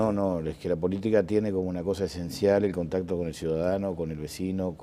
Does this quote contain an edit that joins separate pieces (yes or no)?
no